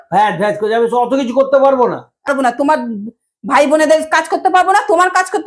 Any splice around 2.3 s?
yes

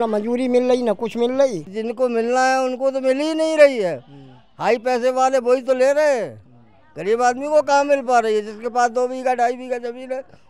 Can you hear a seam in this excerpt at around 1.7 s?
yes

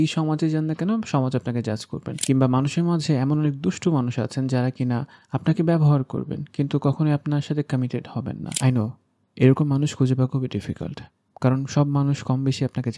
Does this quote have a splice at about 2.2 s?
yes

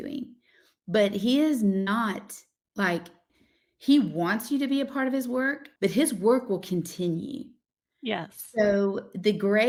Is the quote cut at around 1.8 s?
no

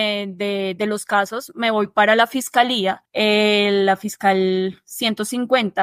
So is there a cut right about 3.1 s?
yes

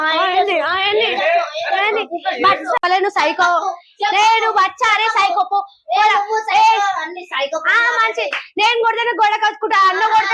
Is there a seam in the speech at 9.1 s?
no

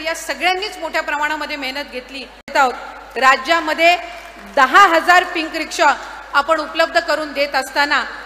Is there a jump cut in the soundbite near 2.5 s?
yes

